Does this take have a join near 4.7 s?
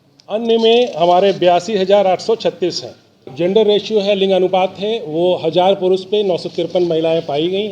no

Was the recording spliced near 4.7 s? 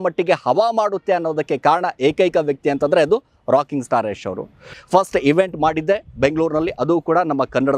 yes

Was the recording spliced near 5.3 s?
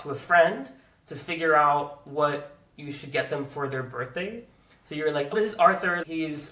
yes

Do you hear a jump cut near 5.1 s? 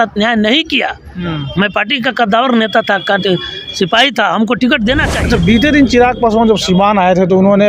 yes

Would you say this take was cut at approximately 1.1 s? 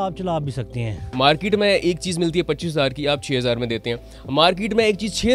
yes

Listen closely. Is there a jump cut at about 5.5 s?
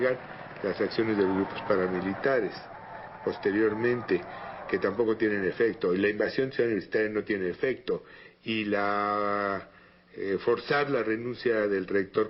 yes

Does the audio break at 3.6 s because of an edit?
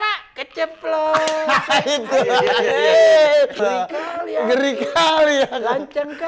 yes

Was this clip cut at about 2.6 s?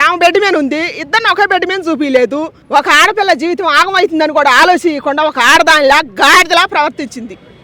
yes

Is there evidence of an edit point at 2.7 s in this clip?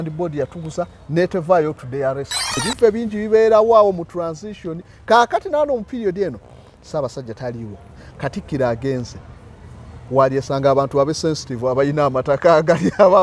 yes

